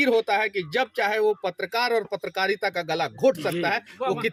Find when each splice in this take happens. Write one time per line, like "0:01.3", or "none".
none